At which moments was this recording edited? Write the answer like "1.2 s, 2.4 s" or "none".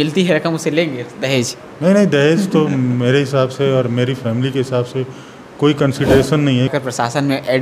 6.7 s